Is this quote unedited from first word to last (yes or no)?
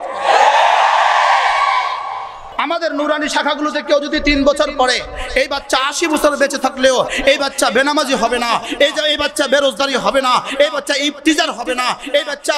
no